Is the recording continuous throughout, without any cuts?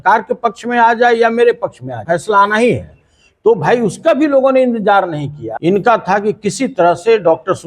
no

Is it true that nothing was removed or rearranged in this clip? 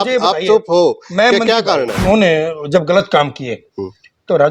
no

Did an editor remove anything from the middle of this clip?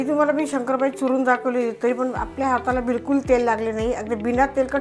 no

